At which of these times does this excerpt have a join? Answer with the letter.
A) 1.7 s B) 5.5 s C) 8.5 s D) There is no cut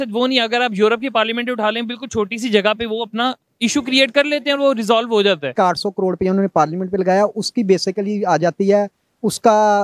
B